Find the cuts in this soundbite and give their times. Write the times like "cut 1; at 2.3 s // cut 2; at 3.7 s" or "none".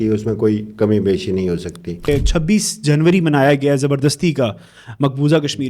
cut 1; at 2.1 s